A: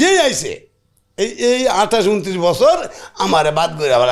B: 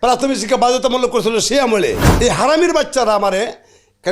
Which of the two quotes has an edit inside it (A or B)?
B